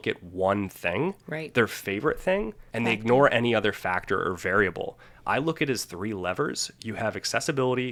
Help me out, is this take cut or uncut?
uncut